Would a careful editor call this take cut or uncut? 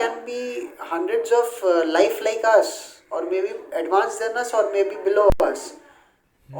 uncut